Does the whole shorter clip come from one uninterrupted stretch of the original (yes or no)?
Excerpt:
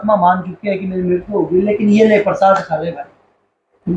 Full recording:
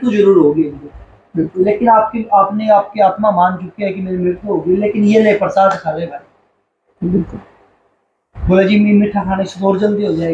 yes